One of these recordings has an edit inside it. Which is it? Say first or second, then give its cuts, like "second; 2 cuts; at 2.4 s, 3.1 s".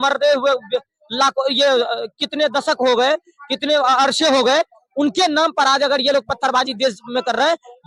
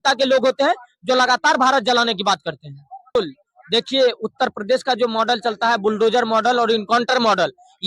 second; 1 cut; at 3.1 s